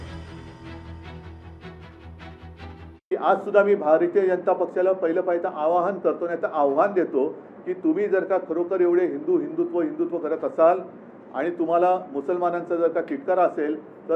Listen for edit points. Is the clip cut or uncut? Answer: cut